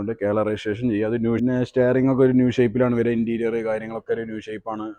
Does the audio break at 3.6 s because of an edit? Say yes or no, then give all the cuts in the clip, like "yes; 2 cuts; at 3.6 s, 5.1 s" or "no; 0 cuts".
no; 1 cut; at 1.4 s